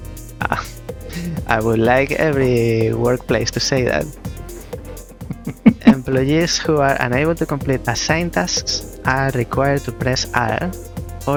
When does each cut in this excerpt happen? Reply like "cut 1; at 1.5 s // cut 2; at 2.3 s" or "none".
none